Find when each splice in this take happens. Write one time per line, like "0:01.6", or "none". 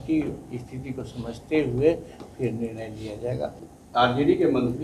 0:03.6